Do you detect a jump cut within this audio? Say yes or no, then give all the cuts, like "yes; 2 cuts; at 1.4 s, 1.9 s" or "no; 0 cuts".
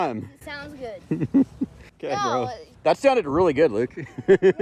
no; 0 cuts